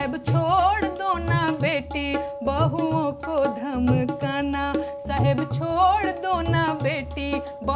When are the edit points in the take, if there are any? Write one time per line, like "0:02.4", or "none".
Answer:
none